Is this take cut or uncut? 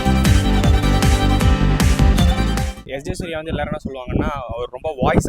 cut